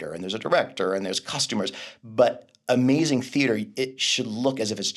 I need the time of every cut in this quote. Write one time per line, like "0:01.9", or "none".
none